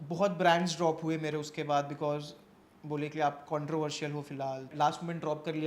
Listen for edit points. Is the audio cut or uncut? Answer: cut